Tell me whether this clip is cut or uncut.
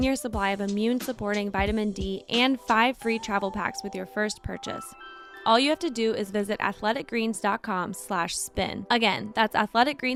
uncut